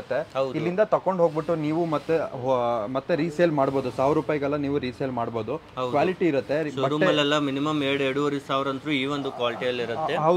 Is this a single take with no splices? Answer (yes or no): yes